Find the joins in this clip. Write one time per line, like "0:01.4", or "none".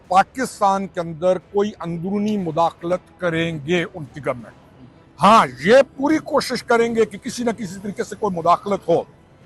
none